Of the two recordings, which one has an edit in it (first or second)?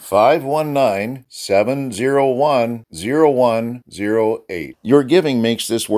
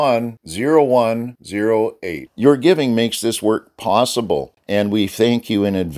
second